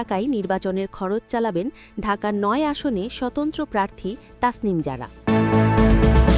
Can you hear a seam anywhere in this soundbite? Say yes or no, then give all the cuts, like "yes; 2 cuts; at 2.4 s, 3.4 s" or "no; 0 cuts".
yes; 1 cut; at 5.1 s